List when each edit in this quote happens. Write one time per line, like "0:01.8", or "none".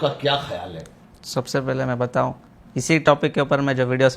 none